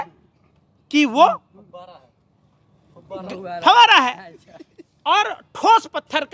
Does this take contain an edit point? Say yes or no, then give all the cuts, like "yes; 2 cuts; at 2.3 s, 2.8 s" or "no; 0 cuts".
no; 0 cuts